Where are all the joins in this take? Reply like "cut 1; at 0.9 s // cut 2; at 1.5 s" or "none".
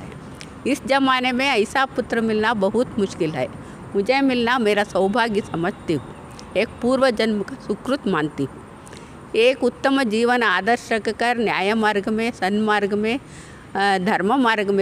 none